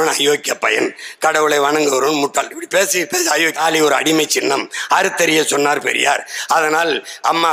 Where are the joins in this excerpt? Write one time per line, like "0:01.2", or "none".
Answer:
0:03.6